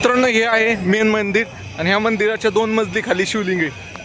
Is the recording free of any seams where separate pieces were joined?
yes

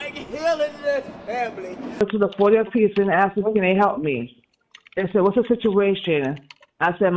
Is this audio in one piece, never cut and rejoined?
no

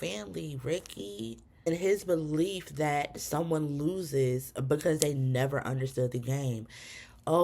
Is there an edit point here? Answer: yes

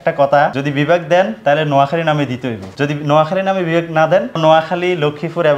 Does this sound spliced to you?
no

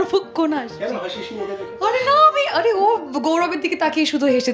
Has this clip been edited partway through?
no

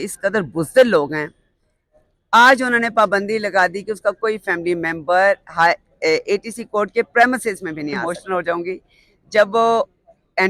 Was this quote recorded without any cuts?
no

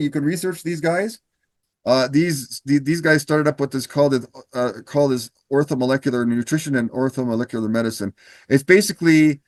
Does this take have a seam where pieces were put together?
no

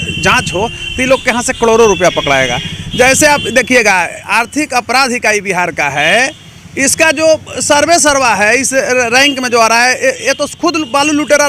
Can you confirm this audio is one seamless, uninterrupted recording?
yes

